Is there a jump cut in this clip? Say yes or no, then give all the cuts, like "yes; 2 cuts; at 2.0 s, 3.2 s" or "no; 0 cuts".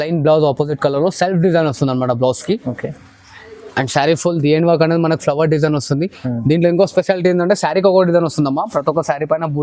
no; 0 cuts